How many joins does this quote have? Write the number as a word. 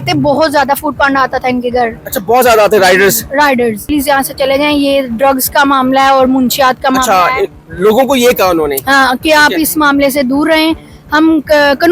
one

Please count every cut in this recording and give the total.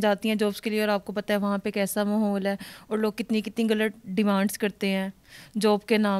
zero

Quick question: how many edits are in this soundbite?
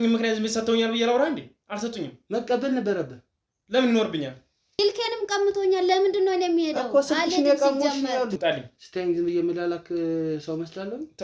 two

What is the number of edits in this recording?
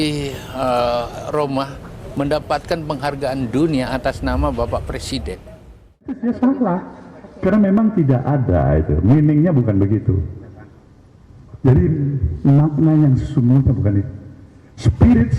one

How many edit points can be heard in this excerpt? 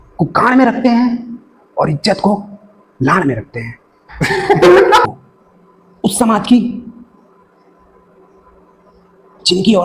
one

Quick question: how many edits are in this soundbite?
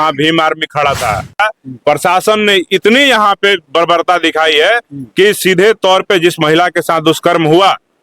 one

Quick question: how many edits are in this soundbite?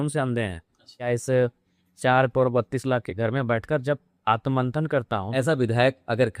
two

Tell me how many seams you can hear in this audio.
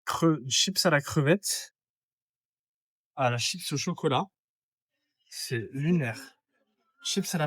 zero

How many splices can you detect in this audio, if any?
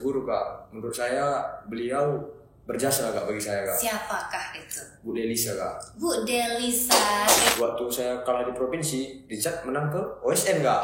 one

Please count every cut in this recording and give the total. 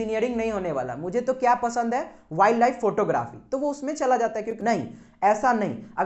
one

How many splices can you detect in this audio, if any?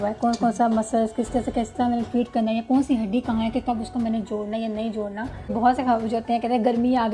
one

